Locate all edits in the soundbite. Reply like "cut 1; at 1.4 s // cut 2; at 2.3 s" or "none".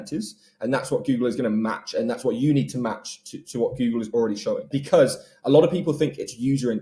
cut 1; at 4.7 s